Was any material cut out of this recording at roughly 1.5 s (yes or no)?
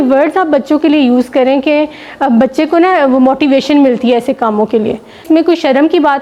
no